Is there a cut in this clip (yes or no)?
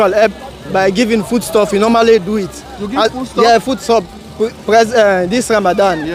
no